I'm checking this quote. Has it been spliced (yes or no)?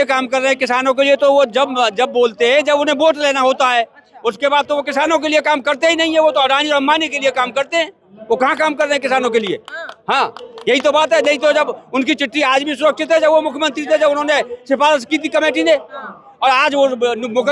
no